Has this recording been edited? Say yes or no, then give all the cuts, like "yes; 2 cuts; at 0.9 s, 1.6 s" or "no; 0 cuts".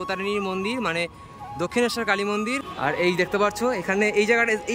yes; 1 cut; at 2.7 s